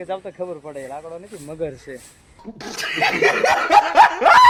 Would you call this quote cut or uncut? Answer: uncut